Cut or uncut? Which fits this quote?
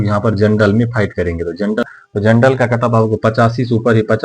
cut